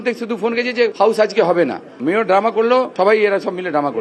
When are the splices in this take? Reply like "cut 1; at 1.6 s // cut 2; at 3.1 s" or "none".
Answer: cut 1; at 0.9 s // cut 2; at 2.9 s